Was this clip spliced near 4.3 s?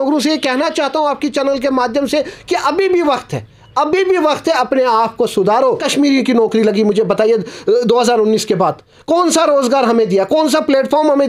no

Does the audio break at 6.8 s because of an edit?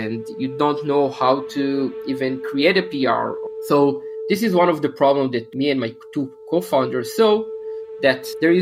no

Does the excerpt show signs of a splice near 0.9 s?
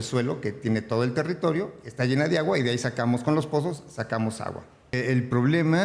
no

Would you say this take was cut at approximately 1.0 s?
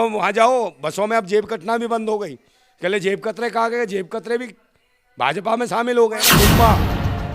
no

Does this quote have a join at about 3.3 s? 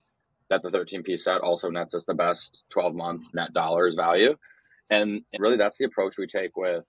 yes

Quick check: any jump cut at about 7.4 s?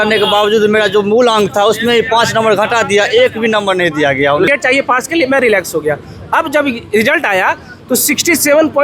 no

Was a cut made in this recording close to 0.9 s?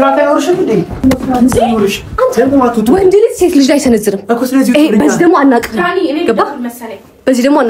yes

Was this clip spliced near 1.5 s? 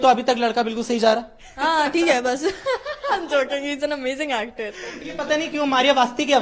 no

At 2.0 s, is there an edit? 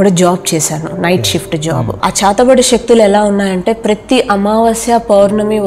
yes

